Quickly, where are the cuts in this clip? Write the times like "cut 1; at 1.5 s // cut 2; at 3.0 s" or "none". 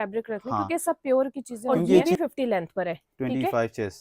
cut 1; at 2.0 s